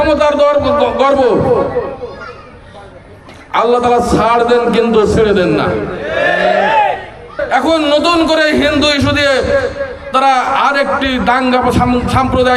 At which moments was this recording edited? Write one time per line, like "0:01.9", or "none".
0:07.4